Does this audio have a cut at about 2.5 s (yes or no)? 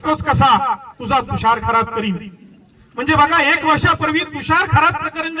no